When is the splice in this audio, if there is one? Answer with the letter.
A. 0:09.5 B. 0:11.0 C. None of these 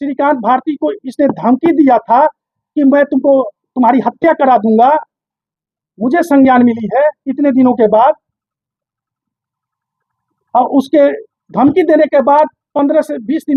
C